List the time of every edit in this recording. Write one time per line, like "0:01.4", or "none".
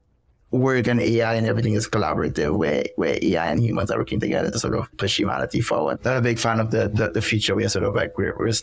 0:05.0
0:06.0